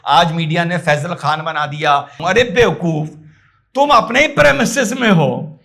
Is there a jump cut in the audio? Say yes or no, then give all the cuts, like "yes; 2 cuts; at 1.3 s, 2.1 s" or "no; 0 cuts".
yes; 1 cut; at 2.2 s